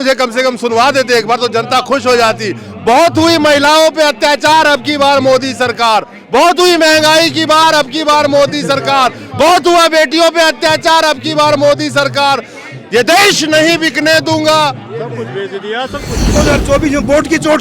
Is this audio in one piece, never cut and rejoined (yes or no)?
no